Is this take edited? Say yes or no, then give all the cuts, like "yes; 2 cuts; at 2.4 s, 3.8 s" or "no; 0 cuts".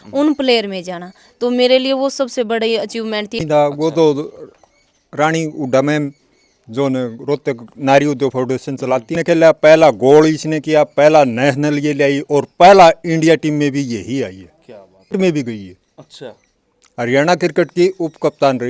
yes; 3 cuts; at 3.4 s, 9.2 s, 15.1 s